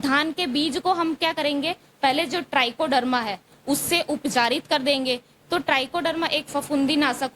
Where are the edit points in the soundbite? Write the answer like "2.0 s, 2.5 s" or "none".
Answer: none